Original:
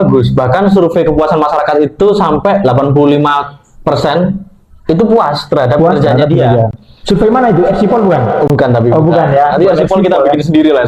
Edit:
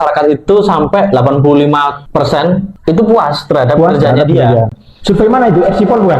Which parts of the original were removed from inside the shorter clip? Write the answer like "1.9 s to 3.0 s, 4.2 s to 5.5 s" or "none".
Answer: 3.8 s to 4.3 s